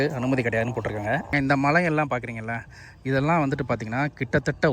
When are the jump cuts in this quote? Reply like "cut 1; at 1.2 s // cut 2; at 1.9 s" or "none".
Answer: cut 1; at 1.3 s